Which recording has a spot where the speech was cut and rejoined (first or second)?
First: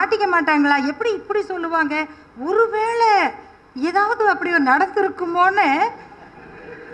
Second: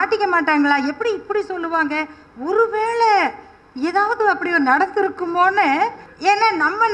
second